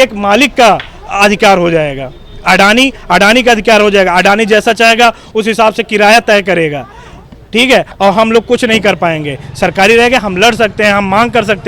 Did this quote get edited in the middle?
no; 0 cuts

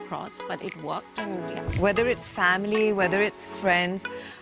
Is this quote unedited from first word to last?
no; 1 cut; at 1.7 s

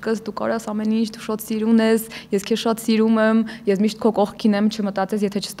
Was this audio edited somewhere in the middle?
no; 0 cuts

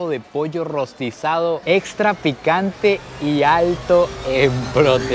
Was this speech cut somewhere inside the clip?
no; 0 cuts

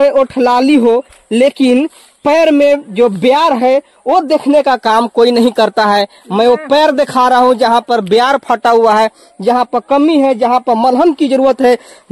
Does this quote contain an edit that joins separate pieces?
no; 0 cuts

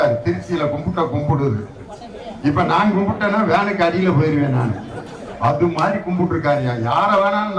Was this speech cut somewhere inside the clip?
no; 0 cuts

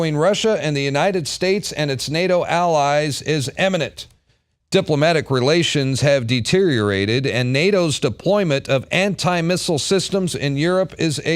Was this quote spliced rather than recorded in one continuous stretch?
yes; 1 cut; at 8.3 s

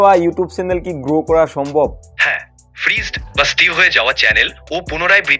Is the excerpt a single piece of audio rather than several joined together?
no; 1 cut; at 2.1 s

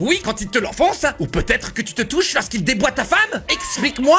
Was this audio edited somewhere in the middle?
no; 0 cuts

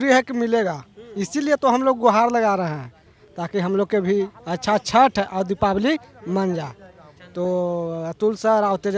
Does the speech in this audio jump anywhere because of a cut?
no; 0 cuts

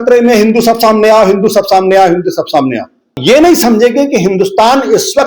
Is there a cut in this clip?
yes; 1 cut; at 3.2 s

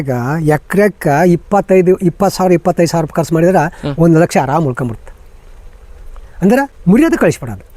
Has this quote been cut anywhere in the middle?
no; 0 cuts

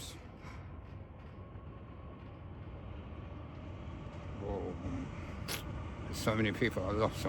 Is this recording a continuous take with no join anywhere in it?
yes; 0 cuts

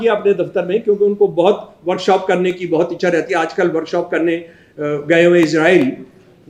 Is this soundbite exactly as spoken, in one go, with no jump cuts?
yes; 0 cuts

